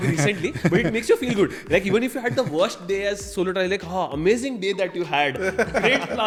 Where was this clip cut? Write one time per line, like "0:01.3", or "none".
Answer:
none